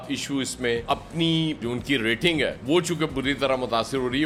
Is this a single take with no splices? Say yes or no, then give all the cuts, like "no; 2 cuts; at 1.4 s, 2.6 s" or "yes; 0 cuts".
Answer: yes; 0 cuts